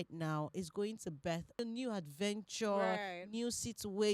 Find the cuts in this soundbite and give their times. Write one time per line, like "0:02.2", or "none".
0:01.6